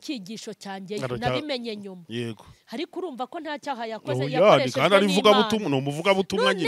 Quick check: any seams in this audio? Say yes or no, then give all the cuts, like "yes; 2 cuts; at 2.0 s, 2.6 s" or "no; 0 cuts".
no; 0 cuts